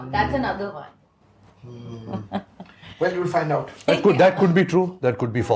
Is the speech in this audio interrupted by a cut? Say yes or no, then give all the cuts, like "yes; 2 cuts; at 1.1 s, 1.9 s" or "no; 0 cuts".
no; 0 cuts